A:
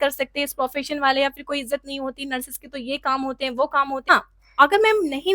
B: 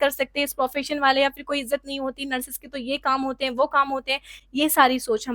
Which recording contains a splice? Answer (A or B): A